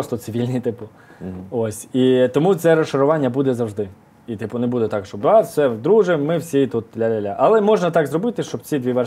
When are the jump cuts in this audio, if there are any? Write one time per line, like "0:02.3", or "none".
none